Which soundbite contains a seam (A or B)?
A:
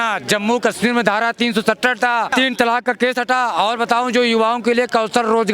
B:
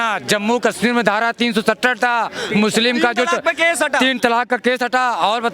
A